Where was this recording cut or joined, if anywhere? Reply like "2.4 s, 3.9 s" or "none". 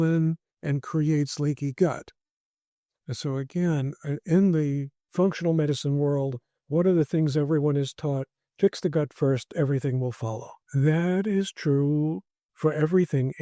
5.0 s, 10.5 s